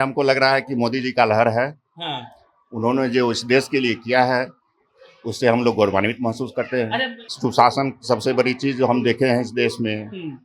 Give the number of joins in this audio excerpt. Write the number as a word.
one